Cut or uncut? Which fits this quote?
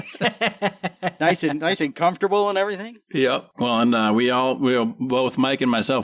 uncut